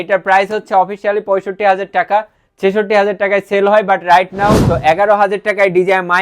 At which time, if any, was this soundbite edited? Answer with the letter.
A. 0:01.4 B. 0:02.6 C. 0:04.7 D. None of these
C